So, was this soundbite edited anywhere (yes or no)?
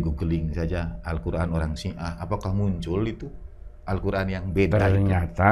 no